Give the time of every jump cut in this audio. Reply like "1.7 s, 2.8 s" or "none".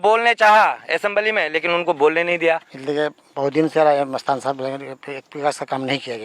2.7 s